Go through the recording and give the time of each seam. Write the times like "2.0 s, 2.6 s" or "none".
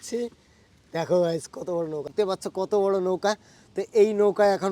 2.1 s